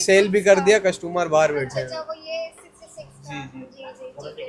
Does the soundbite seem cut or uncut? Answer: uncut